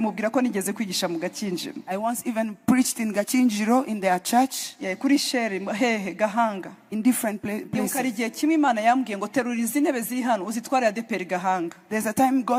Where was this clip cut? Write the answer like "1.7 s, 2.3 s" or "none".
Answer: none